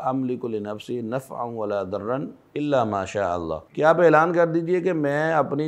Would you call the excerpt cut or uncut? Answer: cut